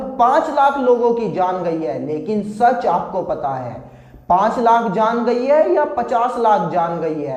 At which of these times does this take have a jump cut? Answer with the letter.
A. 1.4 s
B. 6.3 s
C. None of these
C